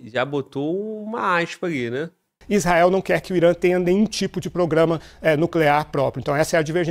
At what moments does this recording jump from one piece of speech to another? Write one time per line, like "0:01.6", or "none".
0:02.4